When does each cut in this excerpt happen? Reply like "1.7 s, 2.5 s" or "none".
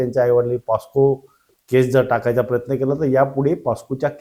none